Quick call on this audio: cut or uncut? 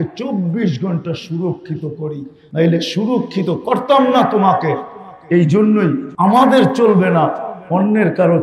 cut